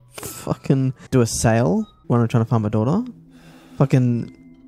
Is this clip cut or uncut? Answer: cut